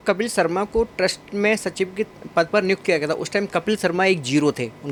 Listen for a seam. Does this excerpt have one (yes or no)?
no